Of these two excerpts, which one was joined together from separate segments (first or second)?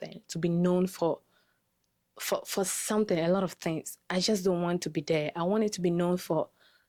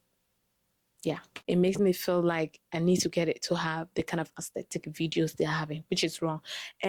second